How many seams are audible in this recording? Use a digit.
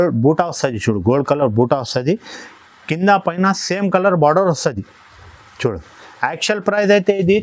0